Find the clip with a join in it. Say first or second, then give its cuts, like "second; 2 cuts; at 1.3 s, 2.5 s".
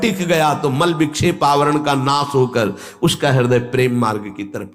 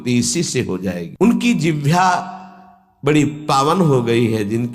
second; 1 cut; at 1.1 s